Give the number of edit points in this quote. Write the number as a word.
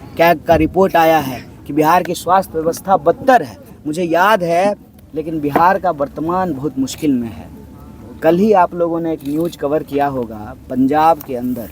one